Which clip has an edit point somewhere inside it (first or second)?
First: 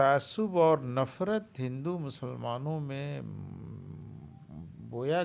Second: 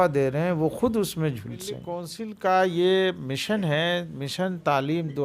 second